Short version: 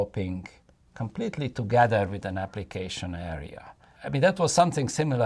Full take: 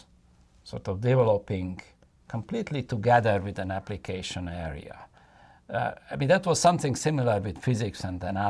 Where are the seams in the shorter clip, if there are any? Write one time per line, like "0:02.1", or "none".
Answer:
0:03.9